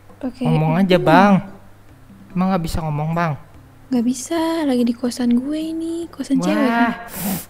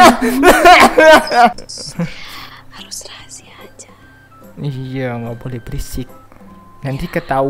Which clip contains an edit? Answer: second; 1 cut; at 1.6 s

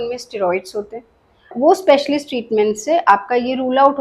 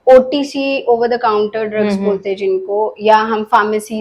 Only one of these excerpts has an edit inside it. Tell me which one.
first; 1 cut; at 1.5 s

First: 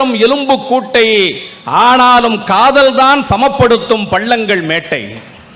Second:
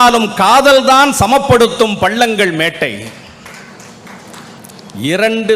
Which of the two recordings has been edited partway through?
second; 1 cut; at 4.6 s

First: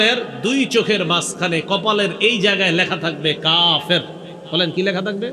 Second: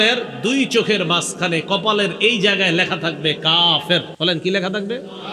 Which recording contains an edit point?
second; 1 cut; at 4.1 s

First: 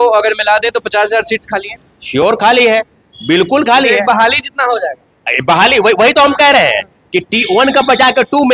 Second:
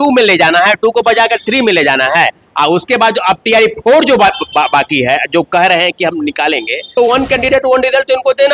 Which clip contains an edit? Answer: second; 1 cut; at 6.9 s

